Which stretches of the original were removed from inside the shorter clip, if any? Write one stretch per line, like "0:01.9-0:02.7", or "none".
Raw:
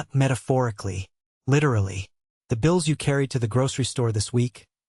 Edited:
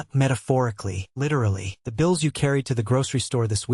0:01.3-0:02.0